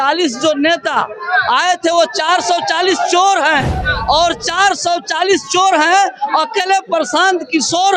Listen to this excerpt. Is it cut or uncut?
uncut